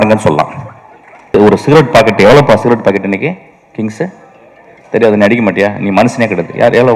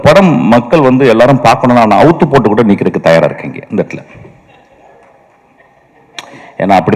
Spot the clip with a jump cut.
first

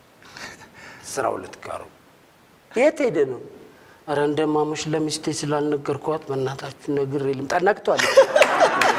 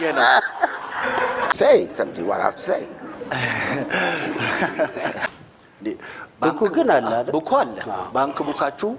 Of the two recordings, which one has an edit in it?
second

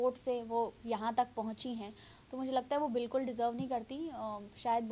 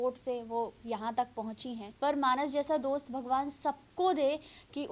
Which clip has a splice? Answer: second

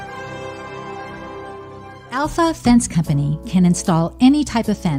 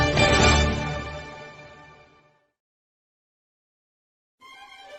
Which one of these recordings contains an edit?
first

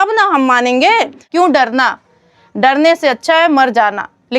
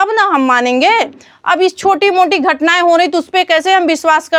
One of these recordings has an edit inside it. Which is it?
first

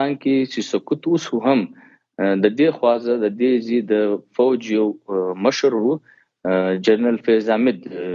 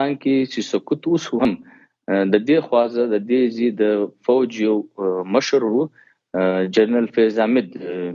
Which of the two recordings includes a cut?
second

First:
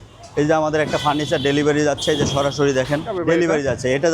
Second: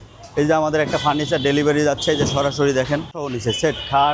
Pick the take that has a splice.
first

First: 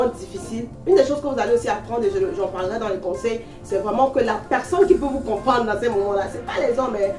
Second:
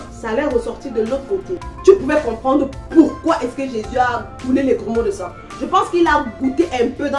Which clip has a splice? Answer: second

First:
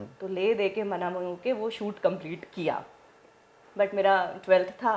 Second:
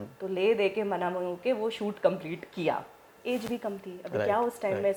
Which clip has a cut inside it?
second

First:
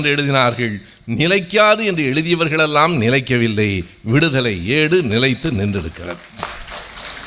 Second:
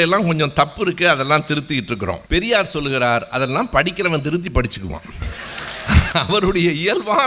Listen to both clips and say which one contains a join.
second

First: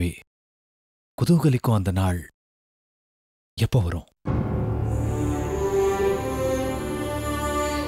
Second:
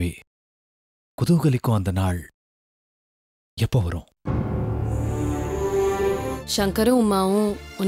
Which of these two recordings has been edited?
second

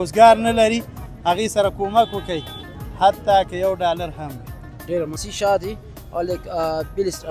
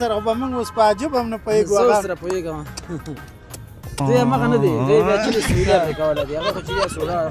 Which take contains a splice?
first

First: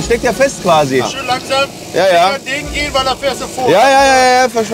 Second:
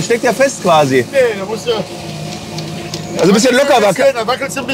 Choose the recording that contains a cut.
first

